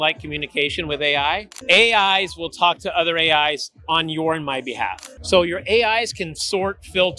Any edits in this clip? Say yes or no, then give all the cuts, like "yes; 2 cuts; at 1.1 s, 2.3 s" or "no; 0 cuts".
yes; 2 cuts; at 1.5 s, 5.1 s